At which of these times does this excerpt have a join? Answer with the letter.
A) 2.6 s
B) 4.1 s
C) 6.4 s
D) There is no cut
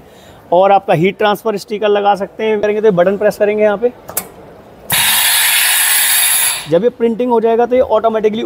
A